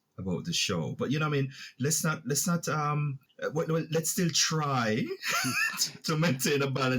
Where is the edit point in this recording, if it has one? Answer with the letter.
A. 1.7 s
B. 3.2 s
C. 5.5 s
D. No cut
B